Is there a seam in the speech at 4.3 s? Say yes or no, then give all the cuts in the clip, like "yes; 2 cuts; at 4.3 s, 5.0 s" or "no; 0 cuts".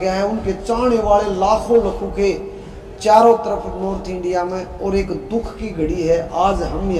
no; 0 cuts